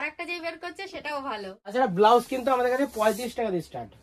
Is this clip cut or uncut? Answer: cut